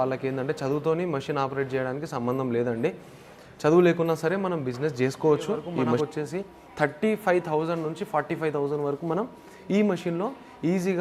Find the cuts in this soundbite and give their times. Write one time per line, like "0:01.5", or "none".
0:06.0

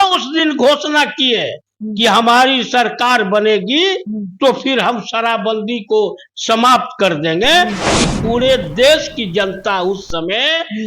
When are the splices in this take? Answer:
0:07.9

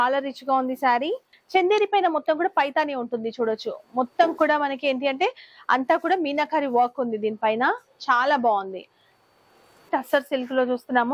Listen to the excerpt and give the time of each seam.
0:01.3
0:09.9

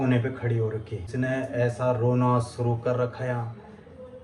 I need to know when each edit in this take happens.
0:01.1

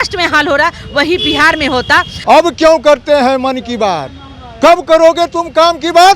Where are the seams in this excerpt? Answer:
0:02.1

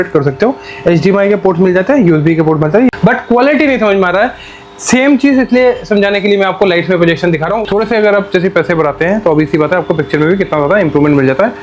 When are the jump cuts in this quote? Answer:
0:02.9
0:07.6

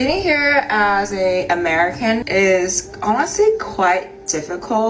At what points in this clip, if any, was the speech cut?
0:01.1
0:02.2

